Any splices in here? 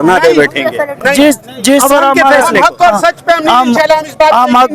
no; 0 cuts

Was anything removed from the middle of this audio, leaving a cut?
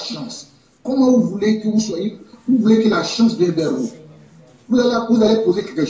no; 0 cuts

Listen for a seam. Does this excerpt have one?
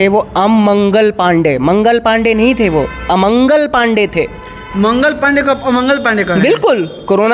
no; 0 cuts

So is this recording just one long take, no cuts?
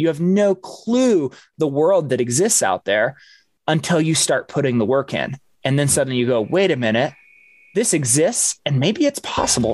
yes; 0 cuts

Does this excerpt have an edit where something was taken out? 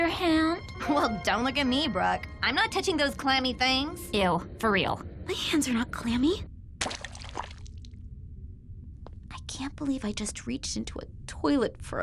yes; 2 cuts; at 6.4 s, 8.9 s

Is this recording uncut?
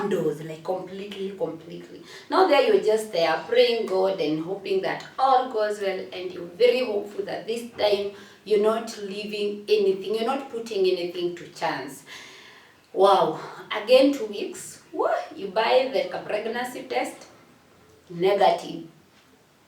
yes; 0 cuts

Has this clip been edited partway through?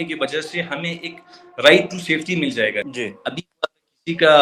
yes; 1 cut; at 2.9 s

